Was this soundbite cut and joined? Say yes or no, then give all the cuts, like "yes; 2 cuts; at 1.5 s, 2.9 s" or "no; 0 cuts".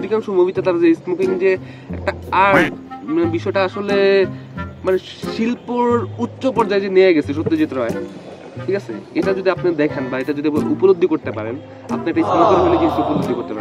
no; 0 cuts